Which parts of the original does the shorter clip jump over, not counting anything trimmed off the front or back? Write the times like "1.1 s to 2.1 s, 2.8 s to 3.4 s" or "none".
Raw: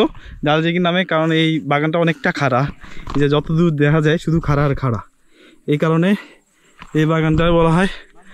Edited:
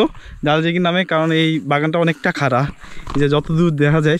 none